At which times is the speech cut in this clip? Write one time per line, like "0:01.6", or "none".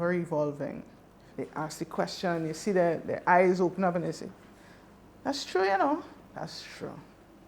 0:01.3